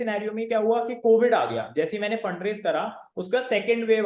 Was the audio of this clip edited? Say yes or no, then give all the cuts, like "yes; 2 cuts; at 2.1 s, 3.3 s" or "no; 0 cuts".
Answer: no; 0 cuts